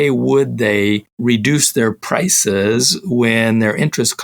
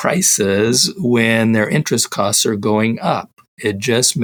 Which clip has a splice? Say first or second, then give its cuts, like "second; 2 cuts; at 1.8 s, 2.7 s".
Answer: first; 1 cut; at 1.1 s